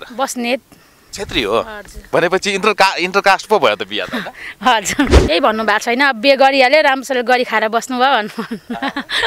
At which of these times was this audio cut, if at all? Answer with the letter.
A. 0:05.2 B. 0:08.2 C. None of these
A